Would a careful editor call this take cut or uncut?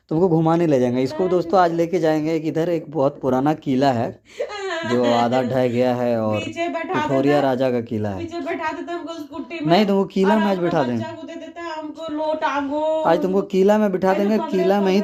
uncut